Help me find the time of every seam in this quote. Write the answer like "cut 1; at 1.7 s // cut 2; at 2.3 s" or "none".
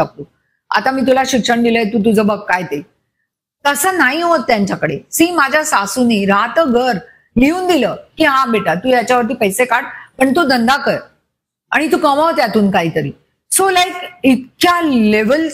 none